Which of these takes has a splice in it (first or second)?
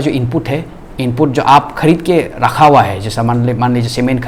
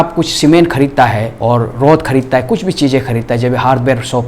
second